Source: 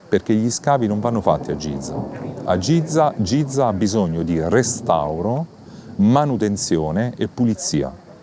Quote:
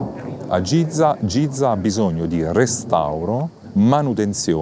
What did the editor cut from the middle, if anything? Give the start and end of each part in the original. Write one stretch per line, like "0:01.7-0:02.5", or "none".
0:05.5-0:05.8